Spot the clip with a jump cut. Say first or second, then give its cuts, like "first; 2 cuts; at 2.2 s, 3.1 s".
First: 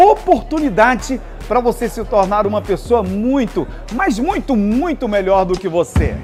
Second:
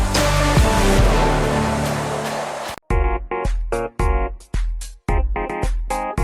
second; 1 cut; at 2.8 s